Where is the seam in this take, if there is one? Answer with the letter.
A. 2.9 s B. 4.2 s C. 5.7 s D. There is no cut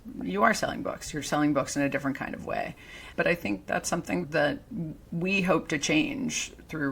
B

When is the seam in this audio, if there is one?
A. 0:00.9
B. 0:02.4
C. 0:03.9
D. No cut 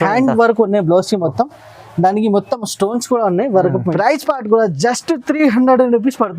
C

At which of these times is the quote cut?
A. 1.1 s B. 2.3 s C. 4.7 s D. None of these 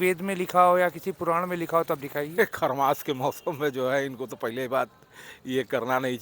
B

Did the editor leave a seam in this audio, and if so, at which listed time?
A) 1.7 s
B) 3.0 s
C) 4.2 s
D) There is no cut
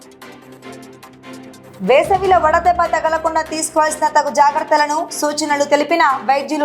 A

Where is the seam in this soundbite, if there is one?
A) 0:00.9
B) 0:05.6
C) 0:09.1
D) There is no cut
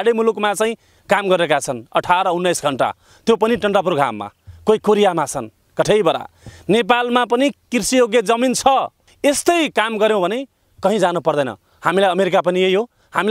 C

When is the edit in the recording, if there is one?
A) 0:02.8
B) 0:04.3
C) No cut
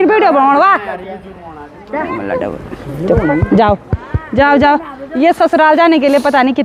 C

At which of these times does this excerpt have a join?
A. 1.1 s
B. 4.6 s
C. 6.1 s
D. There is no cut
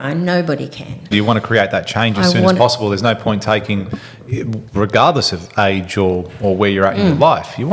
A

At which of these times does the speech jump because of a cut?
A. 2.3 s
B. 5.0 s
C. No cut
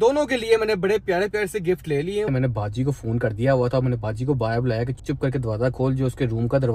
A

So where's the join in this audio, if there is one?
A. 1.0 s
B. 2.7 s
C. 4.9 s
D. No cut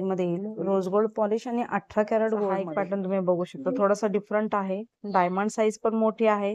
B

